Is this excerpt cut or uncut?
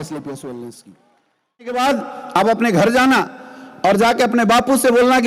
cut